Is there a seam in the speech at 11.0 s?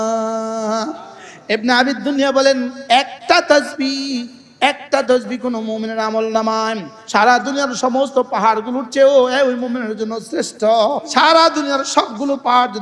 yes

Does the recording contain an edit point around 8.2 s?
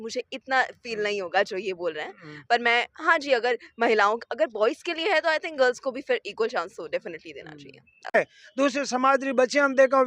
yes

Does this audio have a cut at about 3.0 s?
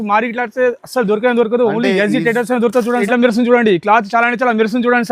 yes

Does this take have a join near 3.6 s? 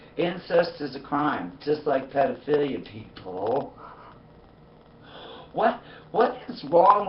yes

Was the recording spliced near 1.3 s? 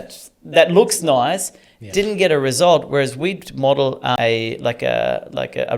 no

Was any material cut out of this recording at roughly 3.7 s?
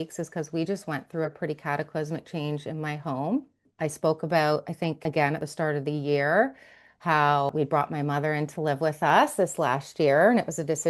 yes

